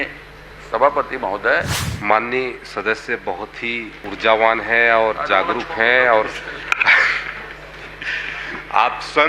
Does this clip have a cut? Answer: yes; 2 cuts; at 1.8 s, 4.0 s

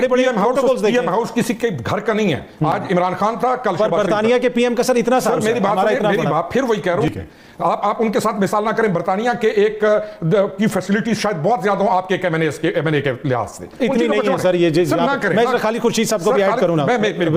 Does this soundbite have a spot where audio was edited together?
no; 0 cuts

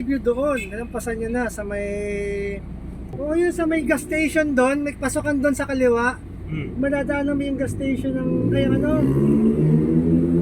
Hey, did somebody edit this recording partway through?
yes; 1 cut; at 3.2 s

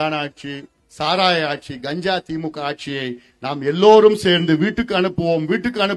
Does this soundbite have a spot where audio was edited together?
no; 0 cuts

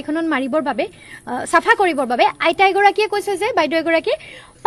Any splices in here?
no; 0 cuts

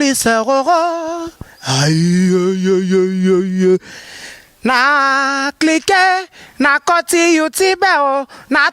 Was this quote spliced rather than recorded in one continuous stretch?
no; 0 cuts

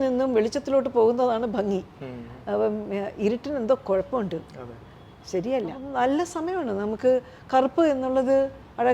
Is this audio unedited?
no; 1 cut; at 5.8 s

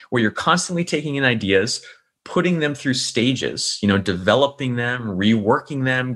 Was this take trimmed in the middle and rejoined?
no; 0 cuts

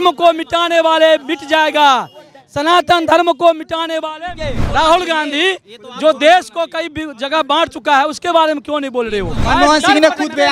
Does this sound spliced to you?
yes; 2 cuts; at 4.6 s, 9.3 s

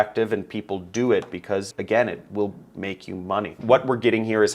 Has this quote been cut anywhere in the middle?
yes; 1 cut; at 3.5 s

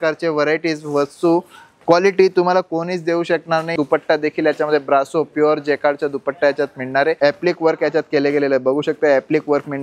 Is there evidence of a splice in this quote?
yes; 2 cuts; at 3.7 s, 7.2 s

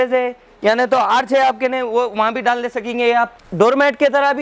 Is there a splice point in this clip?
yes; 1 cut; at 3.4 s

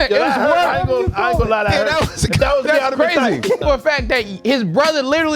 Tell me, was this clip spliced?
yes; 1 cut; at 3.6 s

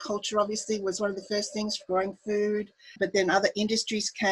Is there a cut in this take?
yes; 1 cut; at 2.9 s

